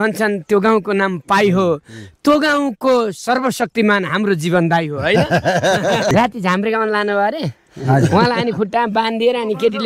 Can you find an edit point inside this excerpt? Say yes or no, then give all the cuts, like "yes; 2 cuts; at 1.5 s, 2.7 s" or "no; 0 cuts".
yes; 1 cut; at 6.1 s